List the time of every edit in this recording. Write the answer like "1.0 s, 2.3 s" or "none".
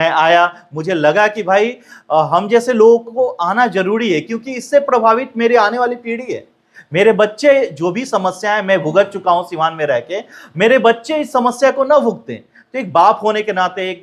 none